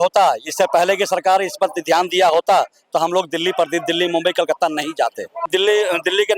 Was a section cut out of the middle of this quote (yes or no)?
yes